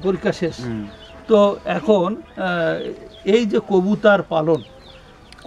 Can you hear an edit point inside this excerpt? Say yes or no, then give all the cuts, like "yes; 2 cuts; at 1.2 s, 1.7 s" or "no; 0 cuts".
no; 0 cuts